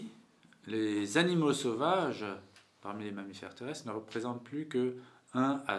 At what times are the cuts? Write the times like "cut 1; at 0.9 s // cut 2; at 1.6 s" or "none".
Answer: none